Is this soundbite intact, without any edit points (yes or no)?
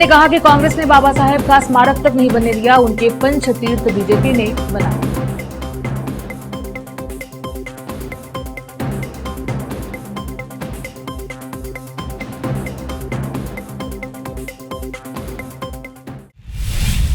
no